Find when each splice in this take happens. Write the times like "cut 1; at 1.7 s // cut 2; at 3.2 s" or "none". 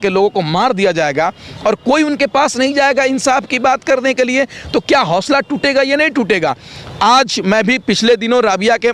none